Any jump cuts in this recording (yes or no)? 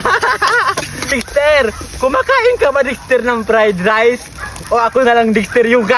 yes